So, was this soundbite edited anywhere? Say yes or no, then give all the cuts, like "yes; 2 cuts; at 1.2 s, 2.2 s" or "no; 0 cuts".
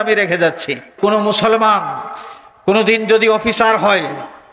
yes; 1 cut; at 1.0 s